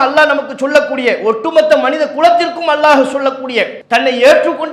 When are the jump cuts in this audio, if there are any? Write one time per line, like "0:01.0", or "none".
0:03.8